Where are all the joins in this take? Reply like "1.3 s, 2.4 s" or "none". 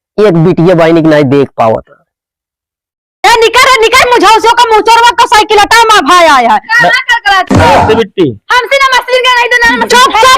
3.0 s